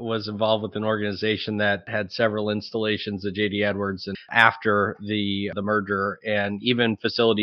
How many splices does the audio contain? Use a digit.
3